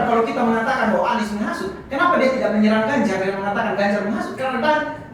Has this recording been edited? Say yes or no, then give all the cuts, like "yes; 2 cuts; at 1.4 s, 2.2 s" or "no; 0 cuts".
no; 0 cuts